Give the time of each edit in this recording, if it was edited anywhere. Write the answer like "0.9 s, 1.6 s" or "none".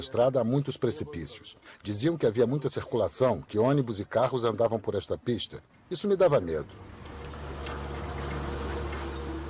7.5 s